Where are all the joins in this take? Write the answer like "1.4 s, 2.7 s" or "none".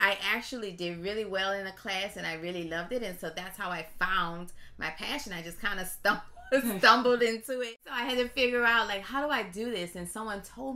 7.9 s